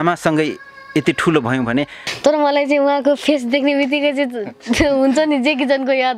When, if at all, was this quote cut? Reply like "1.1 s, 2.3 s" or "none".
2.0 s